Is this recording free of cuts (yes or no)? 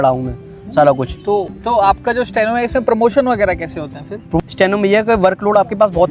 no